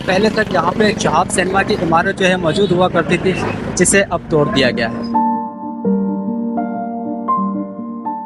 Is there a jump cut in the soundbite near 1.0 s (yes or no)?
no